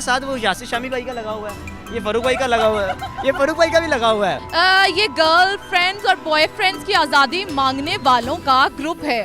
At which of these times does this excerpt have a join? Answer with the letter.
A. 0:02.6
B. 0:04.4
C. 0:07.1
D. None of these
B